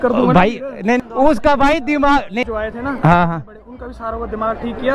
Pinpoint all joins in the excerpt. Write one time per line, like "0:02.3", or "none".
0:01.0
0:02.4